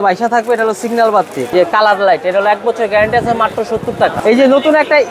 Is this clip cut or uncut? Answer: cut